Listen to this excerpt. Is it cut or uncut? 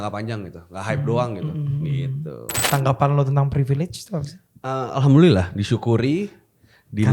cut